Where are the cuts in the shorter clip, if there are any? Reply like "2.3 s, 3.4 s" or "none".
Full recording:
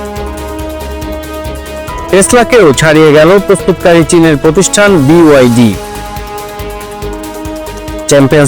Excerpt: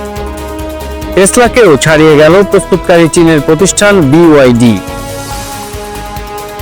1.1 s